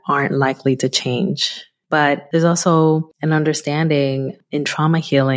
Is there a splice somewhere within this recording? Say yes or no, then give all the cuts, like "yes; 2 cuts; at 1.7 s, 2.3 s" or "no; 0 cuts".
yes; 2 cuts; at 2.0 s, 3.1 s